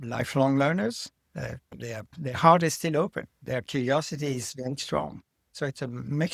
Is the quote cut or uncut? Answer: cut